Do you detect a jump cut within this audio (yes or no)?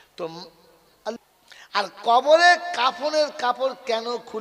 yes